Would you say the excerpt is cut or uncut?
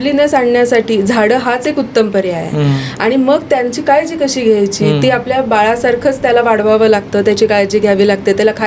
uncut